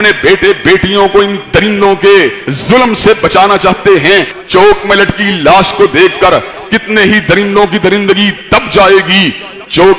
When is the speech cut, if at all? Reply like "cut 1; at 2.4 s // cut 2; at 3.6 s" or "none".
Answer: cut 1; at 4.4 s